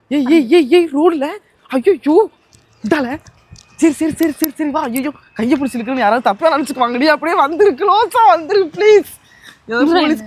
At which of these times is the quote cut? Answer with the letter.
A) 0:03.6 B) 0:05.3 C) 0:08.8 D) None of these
D